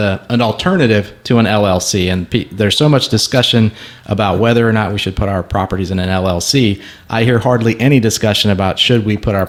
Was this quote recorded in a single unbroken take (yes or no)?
yes